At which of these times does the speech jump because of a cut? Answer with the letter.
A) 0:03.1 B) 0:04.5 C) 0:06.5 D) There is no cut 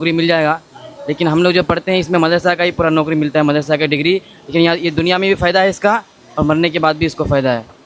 D